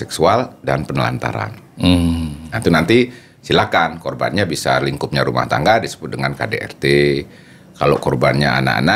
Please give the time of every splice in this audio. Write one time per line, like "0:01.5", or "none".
none